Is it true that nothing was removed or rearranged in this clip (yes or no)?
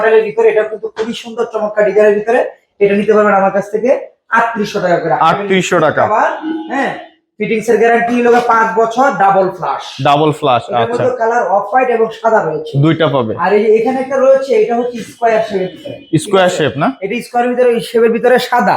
yes